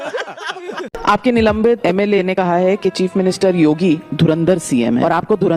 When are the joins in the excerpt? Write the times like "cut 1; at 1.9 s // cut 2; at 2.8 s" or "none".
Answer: cut 1; at 0.9 s